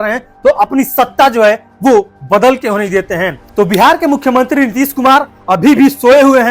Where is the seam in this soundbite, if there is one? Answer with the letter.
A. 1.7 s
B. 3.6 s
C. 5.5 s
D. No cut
B